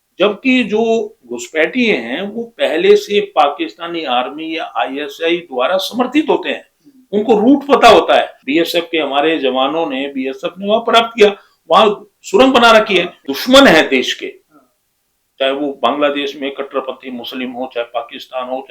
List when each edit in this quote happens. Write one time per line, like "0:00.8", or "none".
0:08.4
0:13.2